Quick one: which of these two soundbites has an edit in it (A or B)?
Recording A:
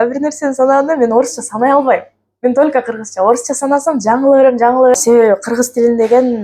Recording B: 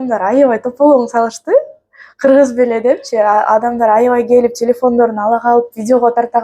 A